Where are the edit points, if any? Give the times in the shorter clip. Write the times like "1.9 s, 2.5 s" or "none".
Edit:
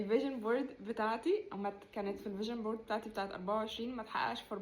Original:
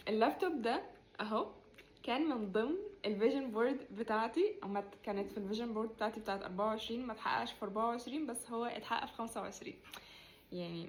none